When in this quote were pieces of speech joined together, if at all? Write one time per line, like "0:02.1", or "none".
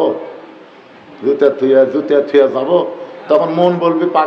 none